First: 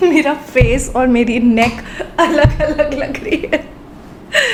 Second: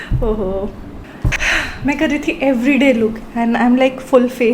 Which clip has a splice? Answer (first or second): second